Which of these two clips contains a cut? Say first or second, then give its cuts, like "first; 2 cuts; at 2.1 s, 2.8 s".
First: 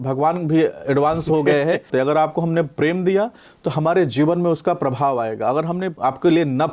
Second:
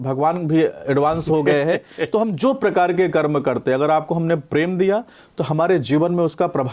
first; 2 cuts; at 1.9 s, 5.9 s